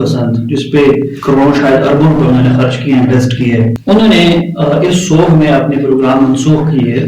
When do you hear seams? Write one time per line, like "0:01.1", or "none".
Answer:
0:03.7